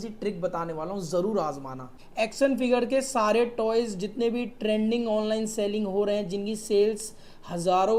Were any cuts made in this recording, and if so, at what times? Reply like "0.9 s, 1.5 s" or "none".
1.9 s